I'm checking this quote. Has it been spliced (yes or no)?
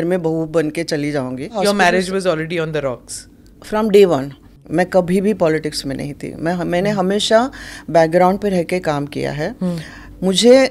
yes